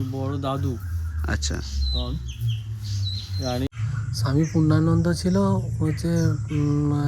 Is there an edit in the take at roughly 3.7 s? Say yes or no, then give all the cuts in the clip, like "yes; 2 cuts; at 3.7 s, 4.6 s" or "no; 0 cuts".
yes; 1 cut; at 3.7 s